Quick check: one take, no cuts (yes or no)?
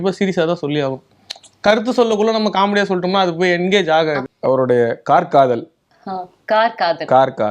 no